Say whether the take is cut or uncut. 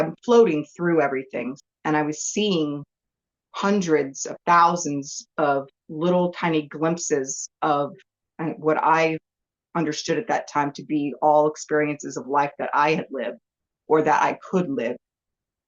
cut